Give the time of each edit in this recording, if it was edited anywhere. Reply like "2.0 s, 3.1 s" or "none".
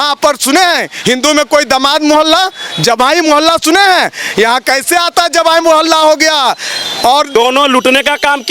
7.3 s